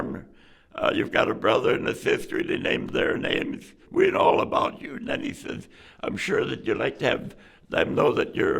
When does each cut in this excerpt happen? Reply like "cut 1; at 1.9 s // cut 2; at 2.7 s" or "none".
cut 1; at 3.7 s